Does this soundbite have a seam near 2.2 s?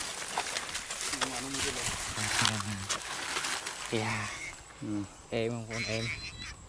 yes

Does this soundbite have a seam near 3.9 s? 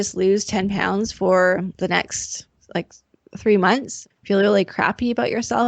yes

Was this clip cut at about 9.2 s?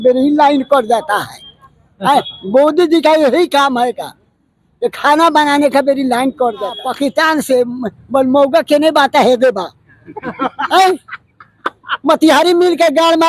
no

